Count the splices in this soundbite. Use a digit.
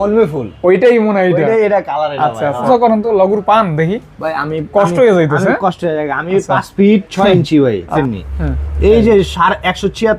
2